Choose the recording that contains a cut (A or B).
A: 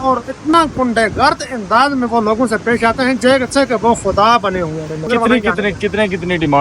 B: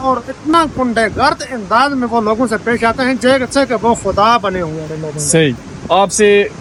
A